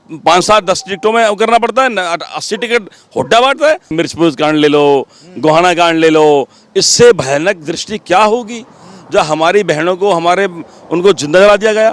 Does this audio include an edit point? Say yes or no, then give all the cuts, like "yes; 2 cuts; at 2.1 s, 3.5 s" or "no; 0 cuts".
yes; 1 cut; at 3.9 s